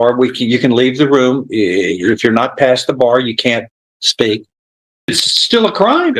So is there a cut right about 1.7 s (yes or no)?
no